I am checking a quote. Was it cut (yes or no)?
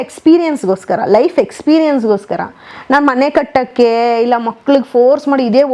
no